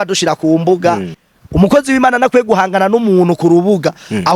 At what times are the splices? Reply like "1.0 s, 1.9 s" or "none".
1.2 s